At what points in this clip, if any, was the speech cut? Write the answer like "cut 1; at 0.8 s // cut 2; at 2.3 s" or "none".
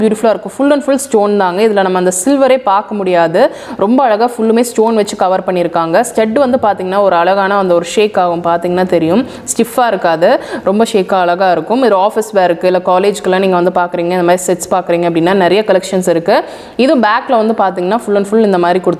none